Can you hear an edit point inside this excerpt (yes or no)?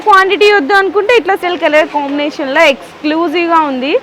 yes